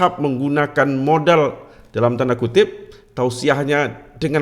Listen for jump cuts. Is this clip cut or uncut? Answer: uncut